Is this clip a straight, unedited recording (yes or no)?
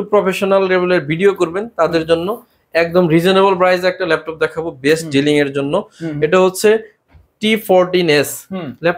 yes